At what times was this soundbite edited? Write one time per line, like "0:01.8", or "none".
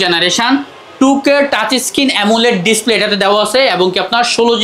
none